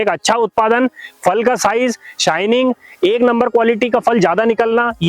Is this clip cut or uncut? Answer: uncut